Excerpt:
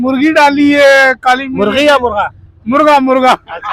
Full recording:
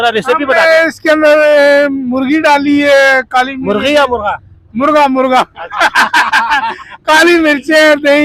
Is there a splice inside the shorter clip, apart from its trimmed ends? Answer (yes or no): no